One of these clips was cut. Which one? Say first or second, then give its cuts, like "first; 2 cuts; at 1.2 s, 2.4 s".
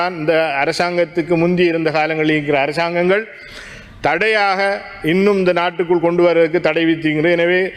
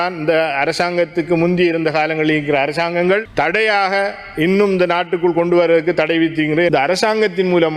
second; 2 cuts; at 3.3 s, 6.7 s